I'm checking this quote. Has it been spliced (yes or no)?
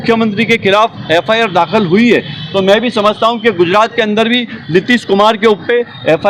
no